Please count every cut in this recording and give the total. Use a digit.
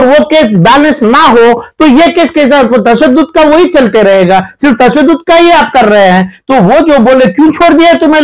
0